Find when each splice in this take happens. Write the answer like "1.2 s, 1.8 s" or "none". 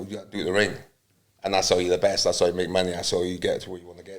none